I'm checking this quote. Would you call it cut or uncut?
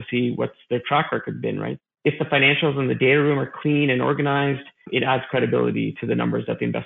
cut